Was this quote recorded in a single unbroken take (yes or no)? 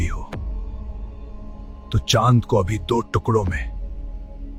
yes